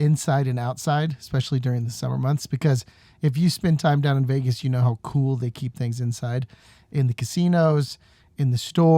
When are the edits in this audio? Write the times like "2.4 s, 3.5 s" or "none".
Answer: none